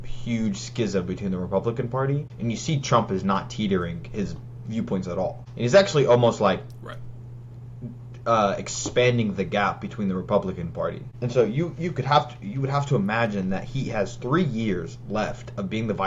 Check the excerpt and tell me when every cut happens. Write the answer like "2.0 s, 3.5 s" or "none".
2.3 s, 5.4 s, 11.1 s